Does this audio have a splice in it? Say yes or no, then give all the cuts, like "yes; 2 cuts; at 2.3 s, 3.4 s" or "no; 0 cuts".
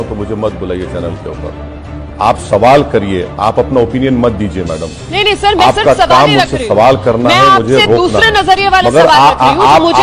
no; 0 cuts